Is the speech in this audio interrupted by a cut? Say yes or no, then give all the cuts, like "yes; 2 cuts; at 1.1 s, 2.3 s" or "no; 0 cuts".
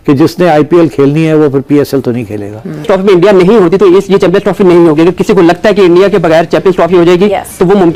yes; 1 cut; at 2.9 s